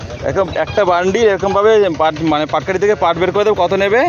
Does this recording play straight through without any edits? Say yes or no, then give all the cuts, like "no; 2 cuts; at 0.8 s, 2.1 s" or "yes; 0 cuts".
yes; 0 cuts